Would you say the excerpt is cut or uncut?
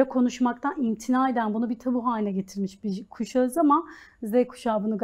uncut